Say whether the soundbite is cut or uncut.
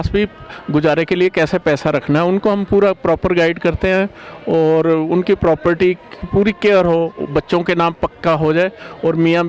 uncut